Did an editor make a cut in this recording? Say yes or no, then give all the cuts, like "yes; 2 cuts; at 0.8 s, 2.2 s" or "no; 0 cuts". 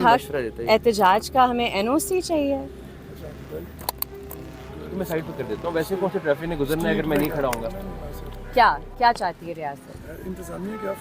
yes; 1 cut; at 8.3 s